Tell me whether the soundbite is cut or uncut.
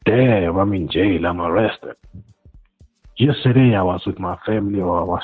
uncut